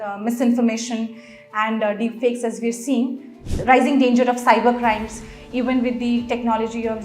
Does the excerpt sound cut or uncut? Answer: cut